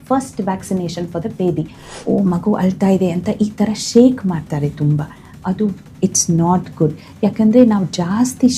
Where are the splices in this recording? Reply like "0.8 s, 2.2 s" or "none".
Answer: 1.9 s